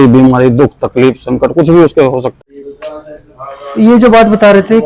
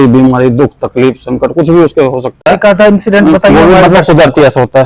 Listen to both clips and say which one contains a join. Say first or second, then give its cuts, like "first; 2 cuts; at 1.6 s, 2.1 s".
first; 1 cut; at 2.3 s